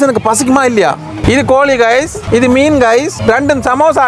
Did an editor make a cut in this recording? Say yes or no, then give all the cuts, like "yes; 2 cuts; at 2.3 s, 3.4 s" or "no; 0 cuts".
yes; 3 cuts; at 1.2 s, 2.2 s, 3.1 s